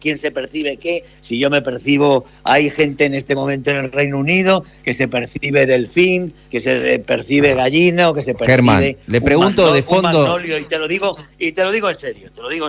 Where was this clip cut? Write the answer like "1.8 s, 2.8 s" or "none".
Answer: none